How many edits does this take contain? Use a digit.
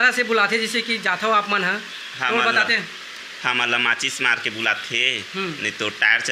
0